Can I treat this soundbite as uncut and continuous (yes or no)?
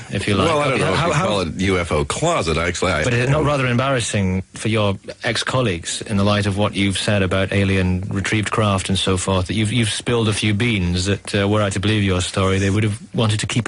no